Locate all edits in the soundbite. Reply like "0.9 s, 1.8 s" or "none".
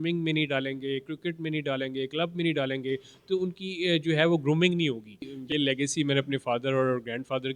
5.4 s